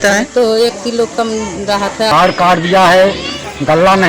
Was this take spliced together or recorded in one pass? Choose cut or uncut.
cut